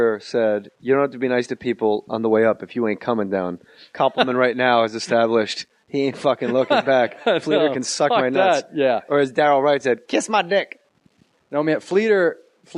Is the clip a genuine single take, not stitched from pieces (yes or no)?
no